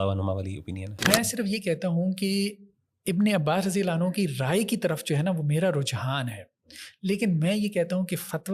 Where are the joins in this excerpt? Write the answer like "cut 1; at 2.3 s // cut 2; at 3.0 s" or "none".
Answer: cut 1; at 0.9 s